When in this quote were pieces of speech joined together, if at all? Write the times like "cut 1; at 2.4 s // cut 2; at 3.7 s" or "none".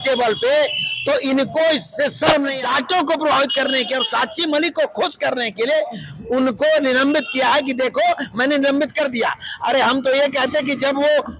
cut 1; at 2.6 s